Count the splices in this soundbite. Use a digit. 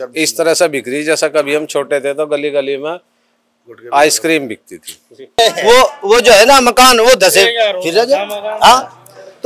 1